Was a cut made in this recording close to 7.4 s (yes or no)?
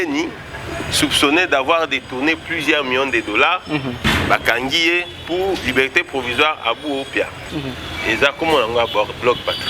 yes